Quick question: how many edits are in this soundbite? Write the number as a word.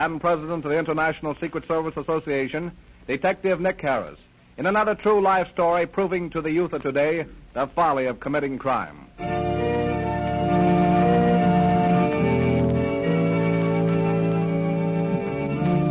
one